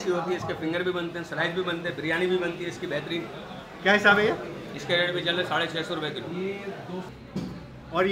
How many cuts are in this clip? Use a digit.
1